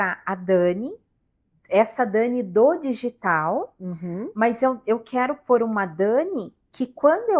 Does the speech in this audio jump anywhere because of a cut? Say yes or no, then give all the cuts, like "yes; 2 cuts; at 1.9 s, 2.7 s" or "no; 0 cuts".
no; 0 cuts